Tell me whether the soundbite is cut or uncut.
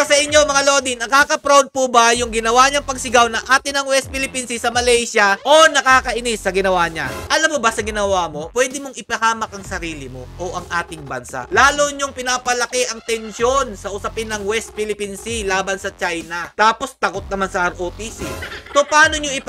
cut